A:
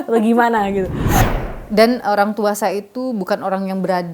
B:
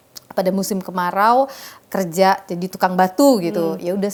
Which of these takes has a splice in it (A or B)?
A